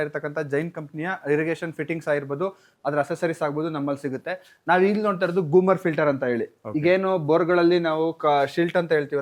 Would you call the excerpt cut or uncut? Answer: uncut